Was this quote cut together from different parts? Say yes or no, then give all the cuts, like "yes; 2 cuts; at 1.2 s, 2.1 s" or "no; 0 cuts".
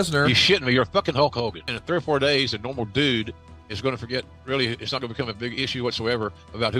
yes; 1 cut; at 1.7 s